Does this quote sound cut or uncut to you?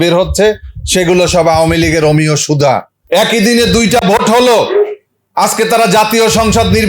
cut